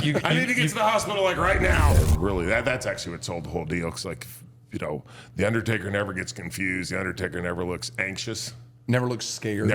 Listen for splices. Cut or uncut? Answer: cut